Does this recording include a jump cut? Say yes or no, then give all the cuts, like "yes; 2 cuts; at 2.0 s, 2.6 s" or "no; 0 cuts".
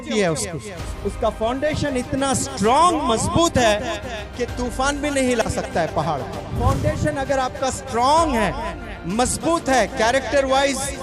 yes; 1 cut; at 6.6 s